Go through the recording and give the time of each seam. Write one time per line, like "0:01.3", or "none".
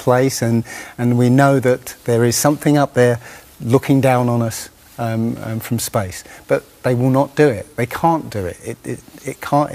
none